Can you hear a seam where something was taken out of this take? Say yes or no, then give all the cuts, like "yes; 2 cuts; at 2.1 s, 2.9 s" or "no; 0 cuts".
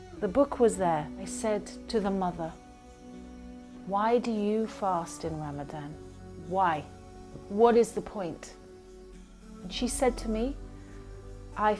yes; 1 cut; at 1.2 s